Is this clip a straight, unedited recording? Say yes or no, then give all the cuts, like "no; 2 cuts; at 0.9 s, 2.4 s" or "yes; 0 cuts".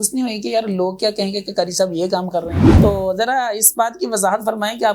no; 1 cut; at 2.6 s